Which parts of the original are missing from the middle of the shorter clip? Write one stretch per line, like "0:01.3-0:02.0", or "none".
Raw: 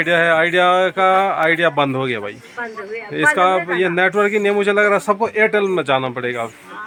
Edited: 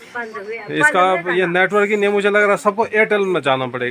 none